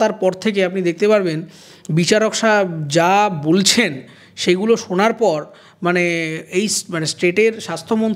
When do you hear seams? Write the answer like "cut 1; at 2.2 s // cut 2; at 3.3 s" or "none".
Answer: none

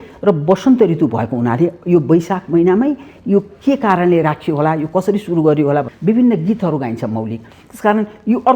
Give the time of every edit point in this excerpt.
cut 1; at 5.9 s

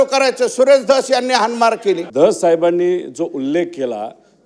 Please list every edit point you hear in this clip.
cut 1; at 2.1 s

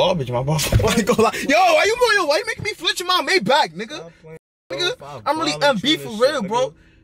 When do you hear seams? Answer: none

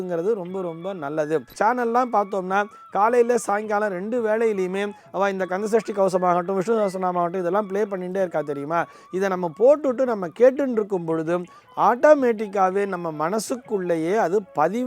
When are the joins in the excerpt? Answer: cut 1; at 1.5 s

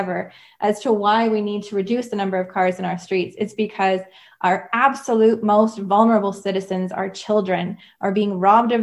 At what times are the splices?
none

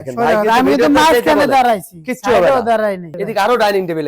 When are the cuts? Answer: cut 1; at 3.1 s

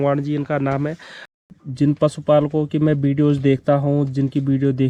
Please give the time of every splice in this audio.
cut 1; at 1.4 s

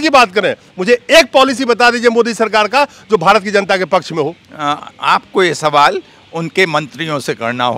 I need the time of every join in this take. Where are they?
none

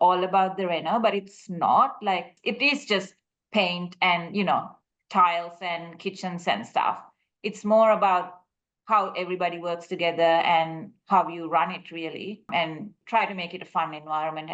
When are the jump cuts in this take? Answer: cut 1; at 2.3 s // cut 2; at 12.8 s

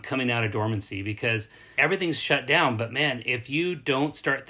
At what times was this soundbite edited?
cut 1; at 1.6 s

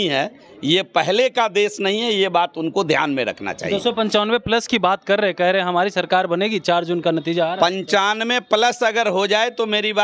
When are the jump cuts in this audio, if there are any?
none

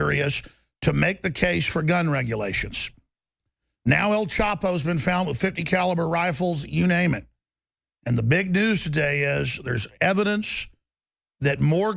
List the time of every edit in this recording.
none

